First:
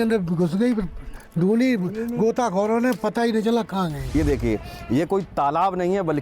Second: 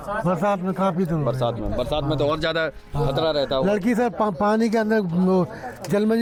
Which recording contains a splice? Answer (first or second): first